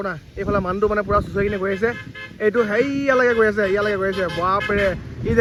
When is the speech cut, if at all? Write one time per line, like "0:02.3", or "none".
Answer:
none